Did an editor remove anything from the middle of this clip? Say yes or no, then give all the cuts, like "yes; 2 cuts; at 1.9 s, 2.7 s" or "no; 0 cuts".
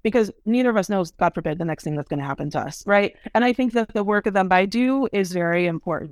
yes; 1 cut; at 3.9 s